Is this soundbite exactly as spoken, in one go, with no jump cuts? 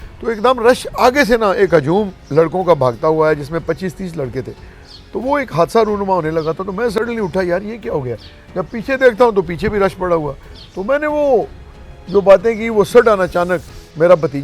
yes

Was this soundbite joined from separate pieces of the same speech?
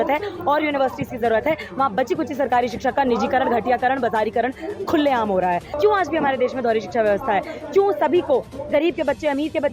yes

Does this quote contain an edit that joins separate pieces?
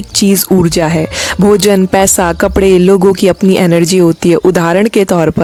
no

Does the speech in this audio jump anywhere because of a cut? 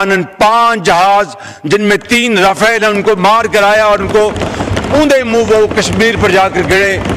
no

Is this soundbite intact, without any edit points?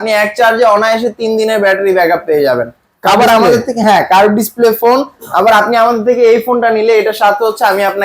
yes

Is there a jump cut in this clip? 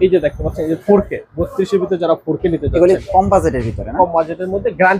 no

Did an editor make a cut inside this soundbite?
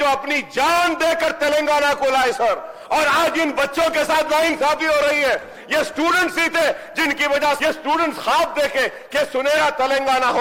no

